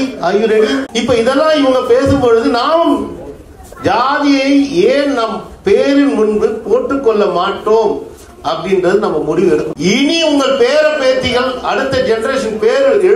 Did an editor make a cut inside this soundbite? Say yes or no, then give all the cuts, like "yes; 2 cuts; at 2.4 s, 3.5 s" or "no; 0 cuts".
yes; 2 cuts; at 0.9 s, 9.7 s